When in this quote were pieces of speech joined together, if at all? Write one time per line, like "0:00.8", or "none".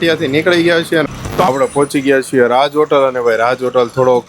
0:01.0